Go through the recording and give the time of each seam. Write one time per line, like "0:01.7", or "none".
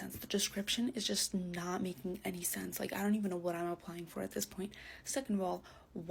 none